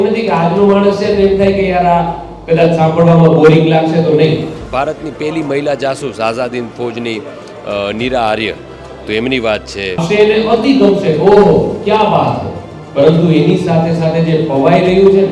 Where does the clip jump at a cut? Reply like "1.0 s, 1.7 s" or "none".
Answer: 4.6 s, 10.0 s